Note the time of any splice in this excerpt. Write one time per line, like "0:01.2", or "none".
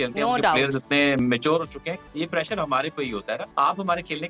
0:01.2
0:02.0
0:03.5